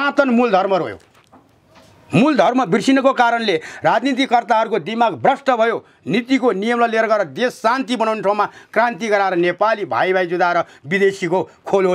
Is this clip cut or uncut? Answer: uncut